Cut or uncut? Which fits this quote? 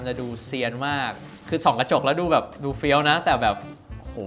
cut